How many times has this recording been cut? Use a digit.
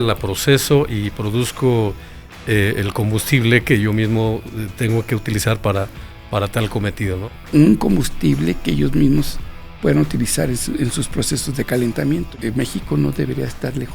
2